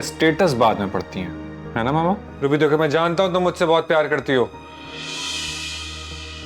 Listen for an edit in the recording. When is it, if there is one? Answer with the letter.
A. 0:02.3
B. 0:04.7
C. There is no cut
A